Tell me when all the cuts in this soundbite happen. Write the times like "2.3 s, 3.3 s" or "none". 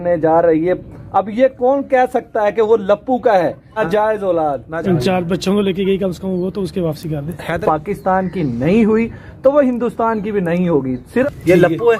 3.7 s, 4.7 s, 7.6 s, 11.0 s